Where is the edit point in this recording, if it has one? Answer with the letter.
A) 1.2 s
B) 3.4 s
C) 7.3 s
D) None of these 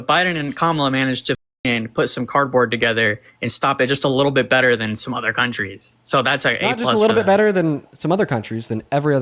D